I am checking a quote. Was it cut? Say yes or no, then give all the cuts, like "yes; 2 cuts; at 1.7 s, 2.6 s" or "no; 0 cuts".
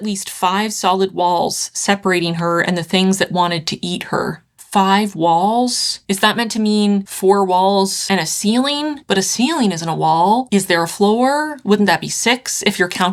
no; 0 cuts